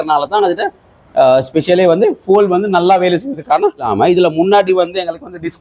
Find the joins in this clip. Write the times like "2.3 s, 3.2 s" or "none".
3.9 s

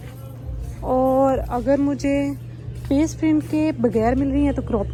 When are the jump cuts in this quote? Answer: none

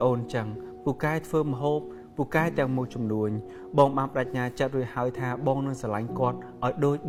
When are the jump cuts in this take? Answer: none

